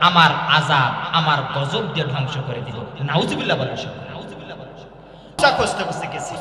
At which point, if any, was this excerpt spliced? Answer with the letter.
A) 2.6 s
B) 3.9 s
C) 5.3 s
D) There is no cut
C